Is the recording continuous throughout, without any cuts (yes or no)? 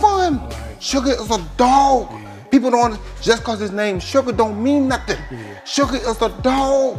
yes